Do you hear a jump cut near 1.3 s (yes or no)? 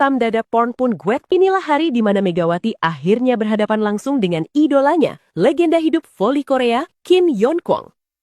yes